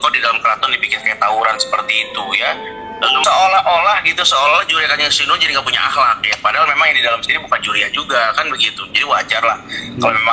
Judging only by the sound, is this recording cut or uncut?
cut